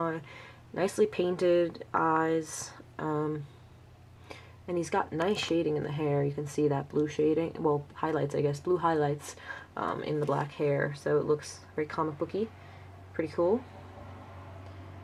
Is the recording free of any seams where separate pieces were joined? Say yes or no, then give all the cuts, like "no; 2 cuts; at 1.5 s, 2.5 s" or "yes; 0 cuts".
yes; 0 cuts